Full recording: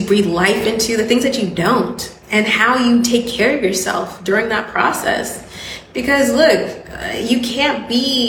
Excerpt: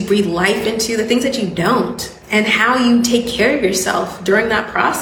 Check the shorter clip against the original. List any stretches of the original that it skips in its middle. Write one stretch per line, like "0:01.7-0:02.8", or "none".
none